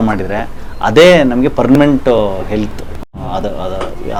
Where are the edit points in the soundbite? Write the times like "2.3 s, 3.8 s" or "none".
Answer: none